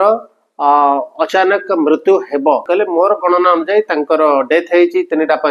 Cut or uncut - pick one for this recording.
cut